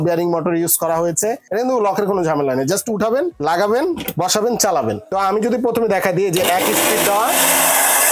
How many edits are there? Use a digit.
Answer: 3